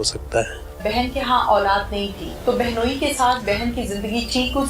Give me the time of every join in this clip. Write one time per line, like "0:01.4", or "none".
0:00.8
0:02.3